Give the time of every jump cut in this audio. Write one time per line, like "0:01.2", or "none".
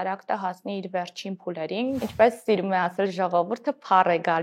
0:02.0